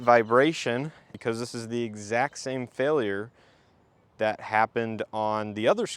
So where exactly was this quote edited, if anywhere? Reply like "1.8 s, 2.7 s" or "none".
1.1 s